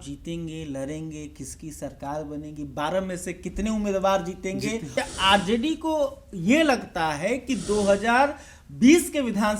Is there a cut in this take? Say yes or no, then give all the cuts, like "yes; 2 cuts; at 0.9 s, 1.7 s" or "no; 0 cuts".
yes; 1 cut; at 5.0 s